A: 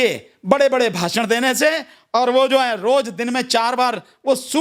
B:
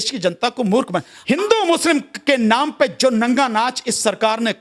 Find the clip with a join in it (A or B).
B